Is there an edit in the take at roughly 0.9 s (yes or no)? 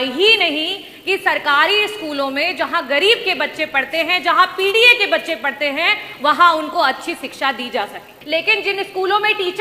no